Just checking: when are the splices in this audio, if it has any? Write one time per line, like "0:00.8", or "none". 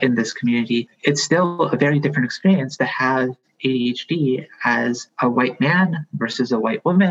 0:00.9
0:05.1